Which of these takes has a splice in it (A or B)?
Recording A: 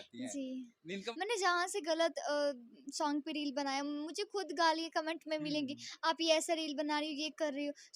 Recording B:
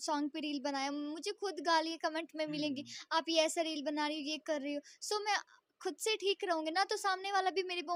A